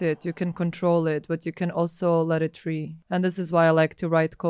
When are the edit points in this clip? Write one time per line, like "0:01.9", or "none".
0:02.9

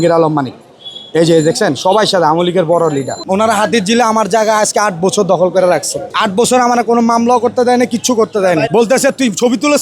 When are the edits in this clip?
0:03.2
0:06.1
0:08.7

